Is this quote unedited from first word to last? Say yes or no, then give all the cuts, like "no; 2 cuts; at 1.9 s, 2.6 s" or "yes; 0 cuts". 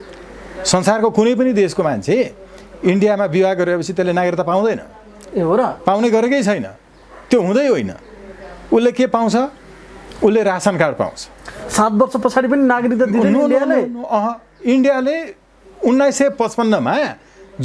yes; 0 cuts